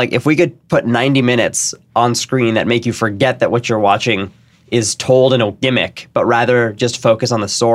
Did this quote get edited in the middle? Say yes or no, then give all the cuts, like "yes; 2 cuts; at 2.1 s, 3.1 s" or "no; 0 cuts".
no; 0 cuts